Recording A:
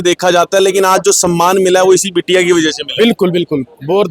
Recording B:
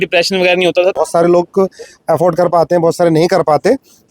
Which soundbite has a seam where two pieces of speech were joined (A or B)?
B